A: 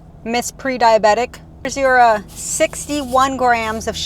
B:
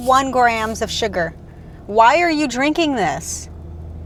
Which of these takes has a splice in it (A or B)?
A